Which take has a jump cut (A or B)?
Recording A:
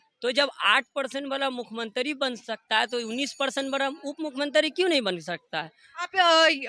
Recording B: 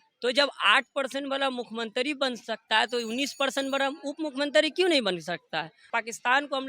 B